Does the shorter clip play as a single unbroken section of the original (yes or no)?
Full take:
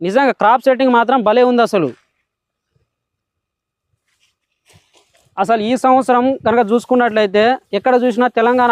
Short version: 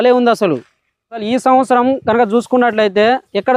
no